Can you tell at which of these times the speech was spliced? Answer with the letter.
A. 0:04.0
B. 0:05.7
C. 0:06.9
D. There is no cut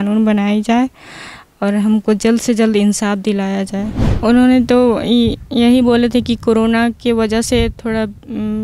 A